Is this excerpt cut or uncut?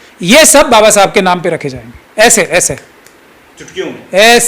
uncut